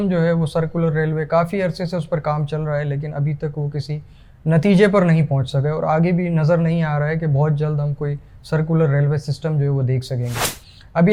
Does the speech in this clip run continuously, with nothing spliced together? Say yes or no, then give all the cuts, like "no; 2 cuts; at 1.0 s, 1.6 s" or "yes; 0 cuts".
yes; 0 cuts